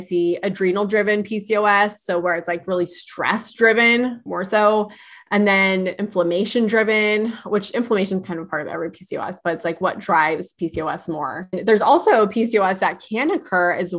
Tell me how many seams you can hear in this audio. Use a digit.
3